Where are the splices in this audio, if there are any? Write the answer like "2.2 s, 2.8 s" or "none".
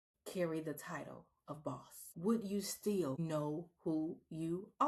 2.0 s, 3.2 s